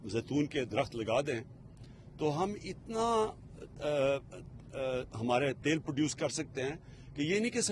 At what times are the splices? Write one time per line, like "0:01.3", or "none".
none